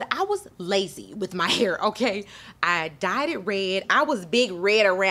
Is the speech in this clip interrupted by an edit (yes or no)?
no